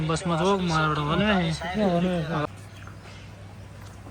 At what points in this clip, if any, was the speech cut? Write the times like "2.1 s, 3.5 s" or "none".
2.4 s